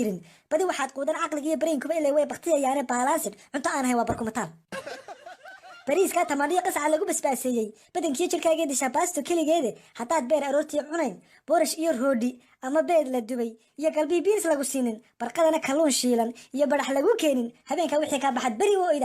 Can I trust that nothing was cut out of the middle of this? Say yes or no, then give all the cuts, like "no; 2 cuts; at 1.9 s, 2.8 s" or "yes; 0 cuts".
no; 1 cut; at 17.9 s